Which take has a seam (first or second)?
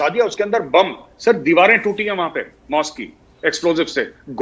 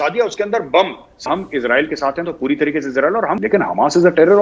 second